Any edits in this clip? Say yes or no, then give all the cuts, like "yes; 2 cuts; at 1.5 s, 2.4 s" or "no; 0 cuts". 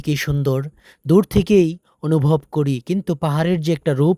no; 0 cuts